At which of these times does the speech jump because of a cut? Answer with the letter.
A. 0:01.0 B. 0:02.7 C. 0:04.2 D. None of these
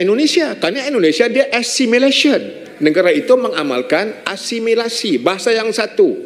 B